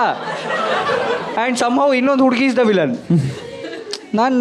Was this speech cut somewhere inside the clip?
no; 0 cuts

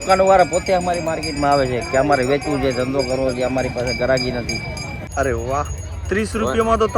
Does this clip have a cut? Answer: yes; 1 cut; at 5.2 s

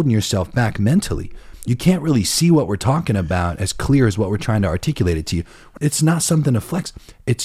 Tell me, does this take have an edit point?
yes; 1 cut; at 5.7 s

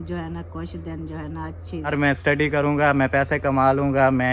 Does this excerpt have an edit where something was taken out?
yes; 1 cut; at 1.9 s

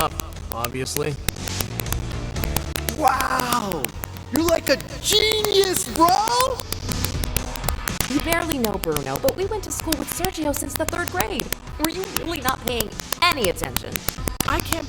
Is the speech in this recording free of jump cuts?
yes; 0 cuts

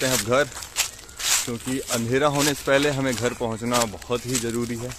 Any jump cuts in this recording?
no; 0 cuts

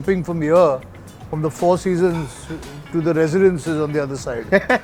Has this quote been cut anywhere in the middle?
no; 0 cuts

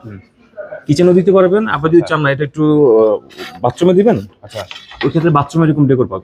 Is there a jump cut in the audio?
no; 0 cuts

